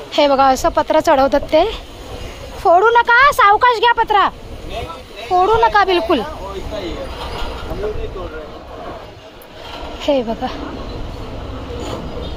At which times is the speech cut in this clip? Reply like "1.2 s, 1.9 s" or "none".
none